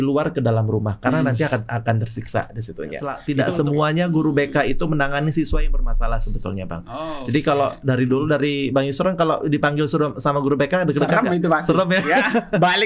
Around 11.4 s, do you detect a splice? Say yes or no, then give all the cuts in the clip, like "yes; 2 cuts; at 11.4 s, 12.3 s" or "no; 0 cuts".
no; 1 cut; at 3.2 s